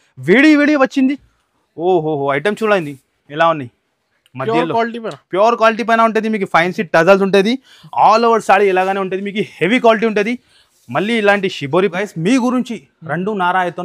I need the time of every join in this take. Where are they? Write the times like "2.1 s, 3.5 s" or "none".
1.2 s, 11.9 s